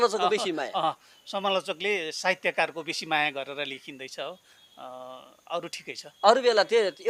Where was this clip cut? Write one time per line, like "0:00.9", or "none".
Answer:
none